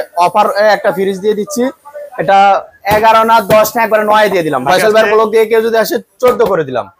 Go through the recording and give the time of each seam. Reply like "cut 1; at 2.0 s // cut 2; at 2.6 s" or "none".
cut 1; at 4.6 s